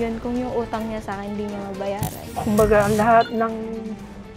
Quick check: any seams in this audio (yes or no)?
yes